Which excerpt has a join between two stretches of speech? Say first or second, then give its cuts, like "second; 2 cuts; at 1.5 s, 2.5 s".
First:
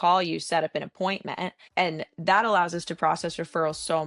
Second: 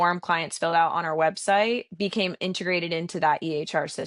first; 1 cut; at 1.6 s